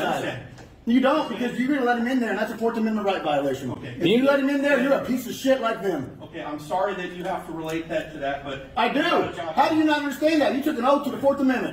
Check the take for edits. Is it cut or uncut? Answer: uncut